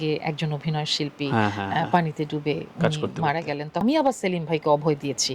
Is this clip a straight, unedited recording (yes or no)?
no